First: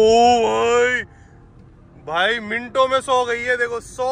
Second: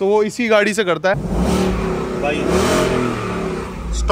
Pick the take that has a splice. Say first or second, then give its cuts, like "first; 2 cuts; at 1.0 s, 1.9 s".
second; 1 cut; at 1.2 s